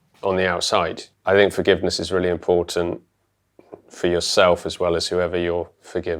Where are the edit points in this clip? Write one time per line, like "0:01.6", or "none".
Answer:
0:01.1

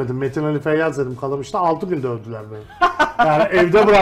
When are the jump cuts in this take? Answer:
none

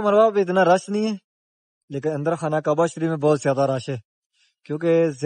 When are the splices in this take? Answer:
none

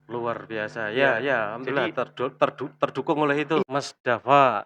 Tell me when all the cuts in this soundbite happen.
0:03.6

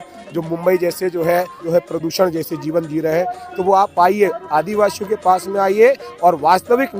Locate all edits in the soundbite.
0:01.6

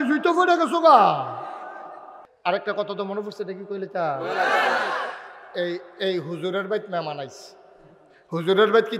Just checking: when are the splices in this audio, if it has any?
0:02.3

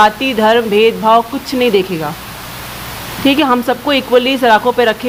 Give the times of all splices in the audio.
none

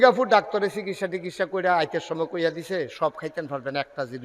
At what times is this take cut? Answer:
none

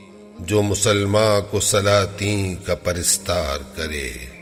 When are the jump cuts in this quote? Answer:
none

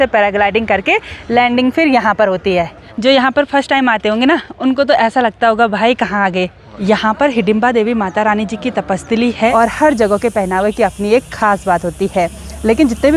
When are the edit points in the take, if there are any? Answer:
0:02.8
0:06.8
0:09.5

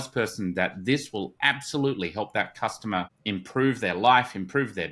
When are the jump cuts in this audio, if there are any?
0:03.2

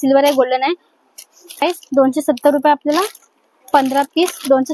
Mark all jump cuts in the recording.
0:01.6

